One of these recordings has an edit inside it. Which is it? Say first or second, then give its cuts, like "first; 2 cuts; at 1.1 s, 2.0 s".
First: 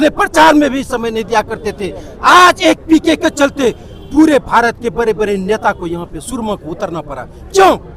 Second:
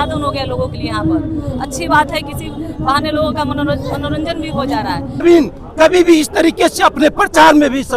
second; 1 cut; at 5.2 s